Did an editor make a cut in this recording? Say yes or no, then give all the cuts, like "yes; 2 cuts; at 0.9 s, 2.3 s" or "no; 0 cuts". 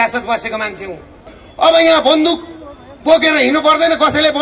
yes; 1 cut; at 1.4 s